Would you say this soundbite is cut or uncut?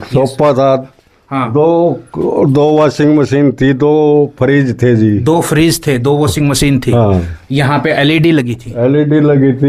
uncut